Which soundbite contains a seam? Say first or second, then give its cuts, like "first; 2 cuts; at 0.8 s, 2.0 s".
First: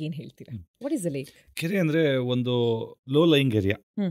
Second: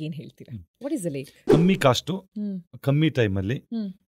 second; 1 cut; at 1.4 s